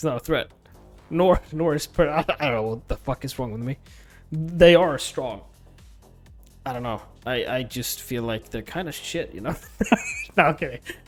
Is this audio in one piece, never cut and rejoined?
yes; 0 cuts

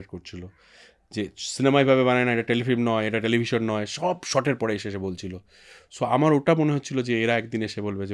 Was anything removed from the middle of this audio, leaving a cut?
no; 0 cuts

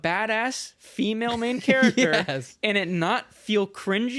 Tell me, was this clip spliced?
no; 0 cuts

